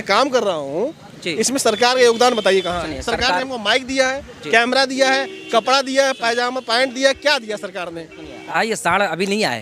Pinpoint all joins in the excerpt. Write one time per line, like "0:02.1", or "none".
0:08.5

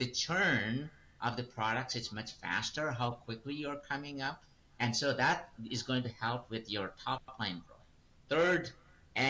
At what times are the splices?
none

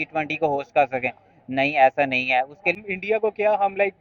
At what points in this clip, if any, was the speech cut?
0:02.8

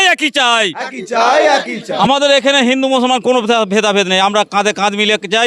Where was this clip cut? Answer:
0:01.8

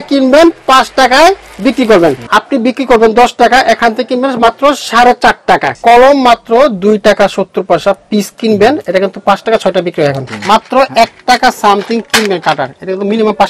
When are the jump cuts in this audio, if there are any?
0:02.2
0:05.7
0:10.3

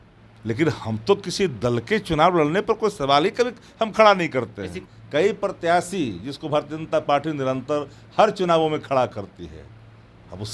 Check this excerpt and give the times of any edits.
0:04.8

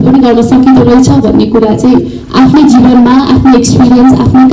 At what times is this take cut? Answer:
none

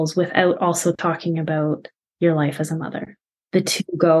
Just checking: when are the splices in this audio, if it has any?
0:03.3

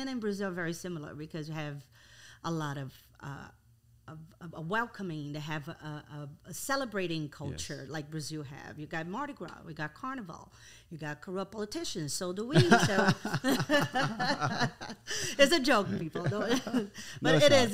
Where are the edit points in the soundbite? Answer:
none

